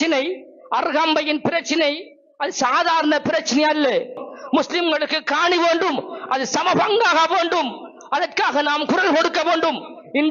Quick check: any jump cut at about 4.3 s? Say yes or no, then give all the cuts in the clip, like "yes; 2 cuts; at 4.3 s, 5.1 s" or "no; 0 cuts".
yes; 1 cut; at 4.3 s